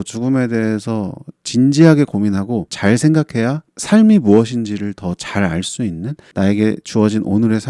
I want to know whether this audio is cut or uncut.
uncut